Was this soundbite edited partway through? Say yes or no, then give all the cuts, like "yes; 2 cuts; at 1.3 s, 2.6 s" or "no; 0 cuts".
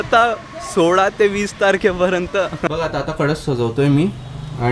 yes; 1 cut; at 2.9 s